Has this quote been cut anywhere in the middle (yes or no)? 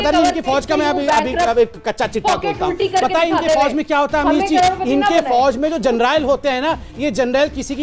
no